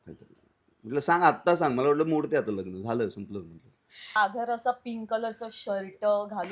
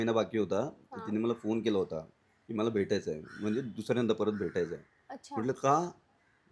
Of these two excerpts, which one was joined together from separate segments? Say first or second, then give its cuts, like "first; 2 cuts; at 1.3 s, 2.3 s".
first; 1 cut; at 4.1 s